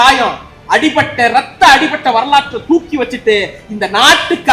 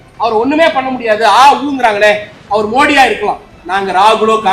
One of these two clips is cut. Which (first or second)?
second